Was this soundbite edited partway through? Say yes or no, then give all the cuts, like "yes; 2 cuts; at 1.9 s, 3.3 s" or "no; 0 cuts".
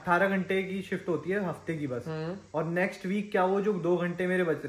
no; 0 cuts